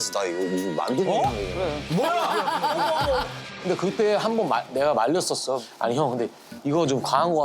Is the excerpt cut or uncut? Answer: uncut